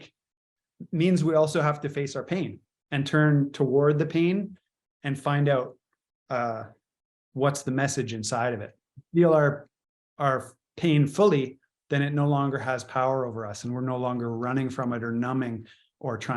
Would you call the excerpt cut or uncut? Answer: cut